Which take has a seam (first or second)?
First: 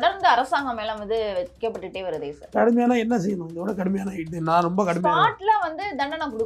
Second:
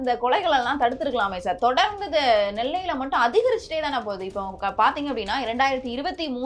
first